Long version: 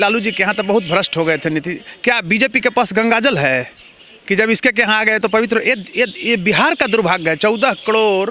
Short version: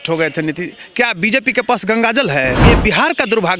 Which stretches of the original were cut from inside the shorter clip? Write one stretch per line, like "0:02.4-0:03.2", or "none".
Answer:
0:03.7-0:06.2